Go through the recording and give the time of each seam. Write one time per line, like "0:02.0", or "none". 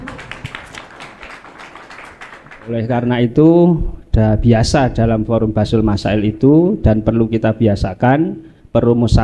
0:02.7